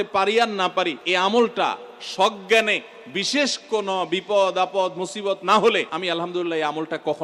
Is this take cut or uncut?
cut